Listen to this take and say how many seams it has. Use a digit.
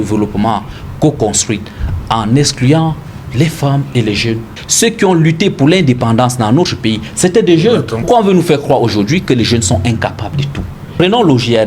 3